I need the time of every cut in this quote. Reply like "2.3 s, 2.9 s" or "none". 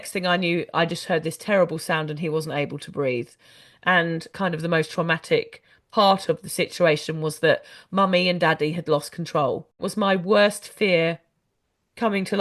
4.3 s, 9.8 s